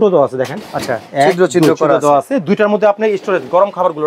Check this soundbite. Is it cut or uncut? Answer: uncut